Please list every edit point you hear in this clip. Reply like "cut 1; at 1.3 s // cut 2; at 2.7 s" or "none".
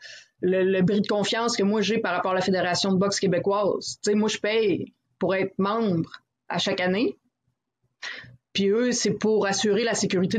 none